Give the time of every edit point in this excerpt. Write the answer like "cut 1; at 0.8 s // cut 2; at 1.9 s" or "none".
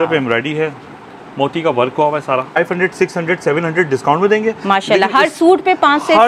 cut 1; at 2.6 s